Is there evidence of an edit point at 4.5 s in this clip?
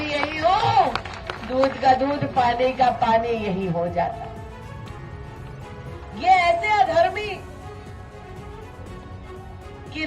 no; 0 cuts

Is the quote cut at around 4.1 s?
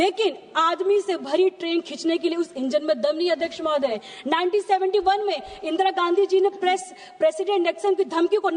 yes; 1 cut; at 4.1 s

